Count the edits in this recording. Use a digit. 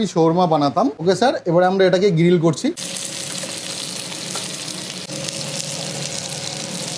1